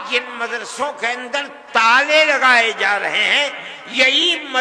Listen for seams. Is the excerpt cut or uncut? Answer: uncut